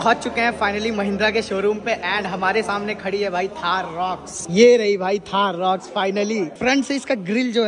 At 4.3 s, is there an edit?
yes; 2 cuts; at 4.3 s, 6.5 s

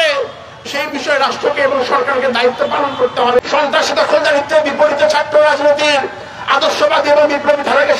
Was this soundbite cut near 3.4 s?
yes; 1 cut; at 3.4 s

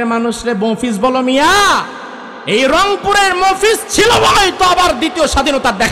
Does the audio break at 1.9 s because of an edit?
no; 0 cuts

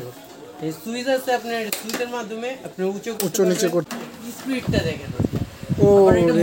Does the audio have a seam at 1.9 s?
no; 1 cut; at 3.9 s

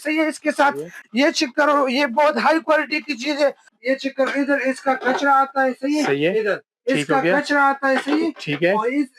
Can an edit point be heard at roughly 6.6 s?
no; 2 cuts; at 1.0 s, 3.7 s

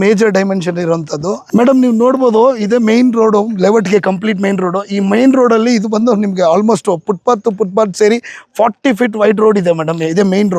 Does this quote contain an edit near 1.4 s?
yes; 1 cut; at 1.4 s

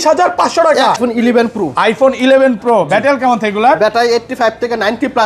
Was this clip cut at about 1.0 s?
yes; 1 cut; at 1.0 s

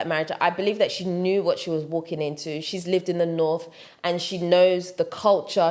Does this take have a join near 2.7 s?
no; 0 cuts

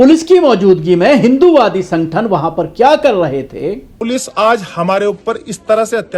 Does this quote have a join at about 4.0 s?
yes; 1 cut; at 4.0 s

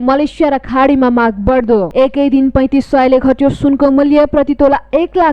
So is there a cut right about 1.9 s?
yes; 1 cut; at 1.9 s

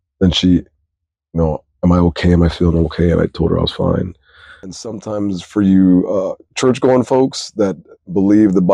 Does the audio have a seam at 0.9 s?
no; 1 cut; at 4.8 s

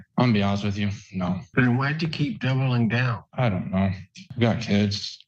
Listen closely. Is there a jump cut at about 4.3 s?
yes; 2 cuts; at 3.2 s, 4.3 s

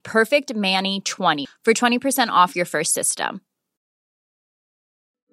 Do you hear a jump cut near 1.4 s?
yes; 1 cut; at 1.4 s

